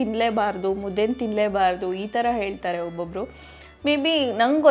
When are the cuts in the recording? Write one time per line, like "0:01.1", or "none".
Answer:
none